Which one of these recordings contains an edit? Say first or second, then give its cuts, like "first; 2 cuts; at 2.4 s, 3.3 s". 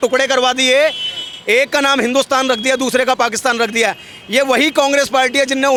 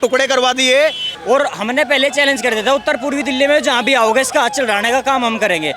second; 1 cut; at 1.1 s